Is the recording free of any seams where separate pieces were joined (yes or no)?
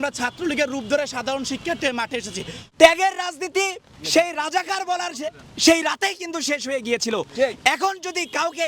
no